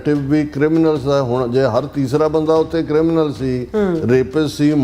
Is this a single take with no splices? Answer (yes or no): yes